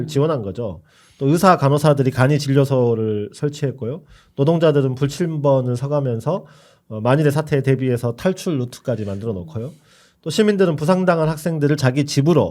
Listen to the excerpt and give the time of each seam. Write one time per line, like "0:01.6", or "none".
none